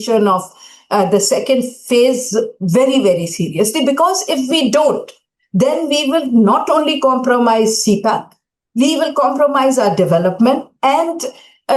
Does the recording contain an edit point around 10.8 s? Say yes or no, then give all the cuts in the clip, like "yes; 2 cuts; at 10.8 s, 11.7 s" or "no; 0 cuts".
no; 0 cuts